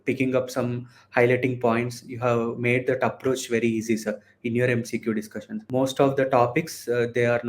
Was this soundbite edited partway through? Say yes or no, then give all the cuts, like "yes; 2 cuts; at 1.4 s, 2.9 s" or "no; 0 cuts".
yes; 1 cut; at 5.6 s